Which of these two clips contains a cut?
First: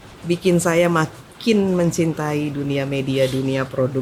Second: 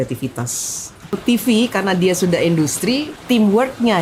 second; 2 cuts; at 1.1 s, 3.1 s

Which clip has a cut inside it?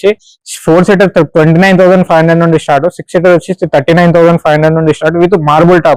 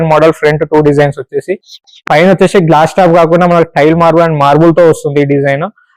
second; 1 cut; at 1.9 s

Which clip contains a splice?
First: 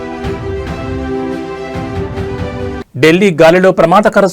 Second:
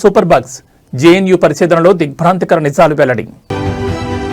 first; 1 cut; at 2.8 s

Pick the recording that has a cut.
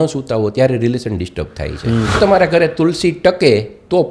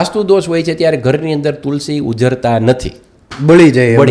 first; 1 cut; at 2.2 s

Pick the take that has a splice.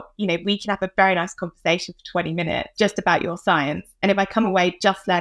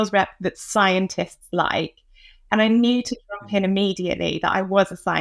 first; 1 cut; at 2.7 s

